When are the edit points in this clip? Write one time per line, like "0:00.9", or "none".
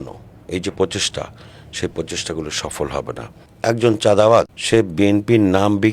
0:03.5
0:04.6

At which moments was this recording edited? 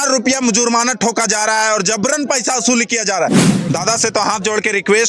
0:03.4

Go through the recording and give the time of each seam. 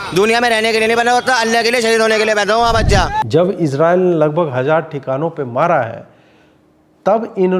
0:03.2

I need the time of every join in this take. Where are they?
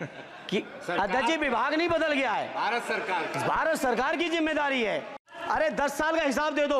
0:05.2

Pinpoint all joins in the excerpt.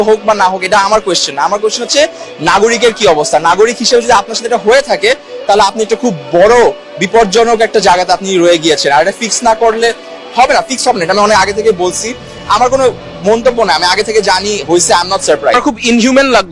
none

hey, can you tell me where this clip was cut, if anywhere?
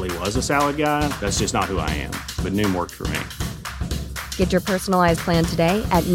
none

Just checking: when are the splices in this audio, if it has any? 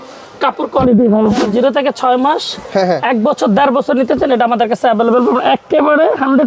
0:01.4

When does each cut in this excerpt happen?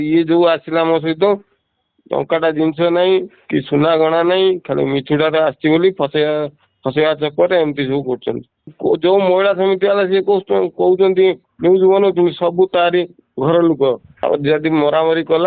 0:08.7
0:14.1

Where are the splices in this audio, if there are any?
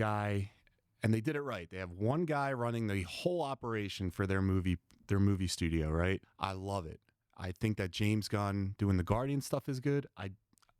0:06.3

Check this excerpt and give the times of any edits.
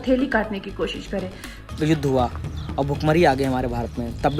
0:01.5

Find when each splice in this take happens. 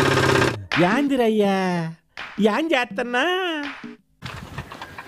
0:04.0

